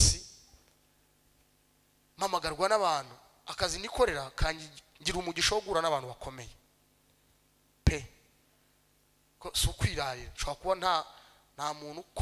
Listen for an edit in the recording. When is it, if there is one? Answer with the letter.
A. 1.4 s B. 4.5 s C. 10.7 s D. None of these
D